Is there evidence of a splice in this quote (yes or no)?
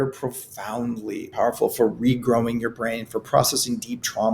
yes